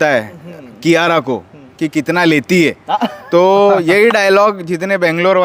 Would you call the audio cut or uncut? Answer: uncut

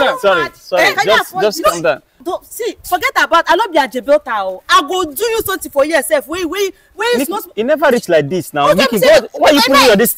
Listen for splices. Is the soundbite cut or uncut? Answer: cut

